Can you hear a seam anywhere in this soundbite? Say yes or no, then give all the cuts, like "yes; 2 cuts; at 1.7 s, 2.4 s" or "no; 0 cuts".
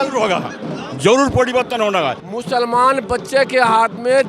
yes; 1 cut; at 2.2 s